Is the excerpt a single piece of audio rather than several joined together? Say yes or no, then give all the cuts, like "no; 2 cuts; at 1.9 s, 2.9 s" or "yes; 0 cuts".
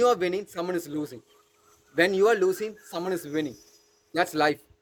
yes; 0 cuts